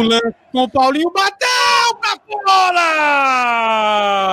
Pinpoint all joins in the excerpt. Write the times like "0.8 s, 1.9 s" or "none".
none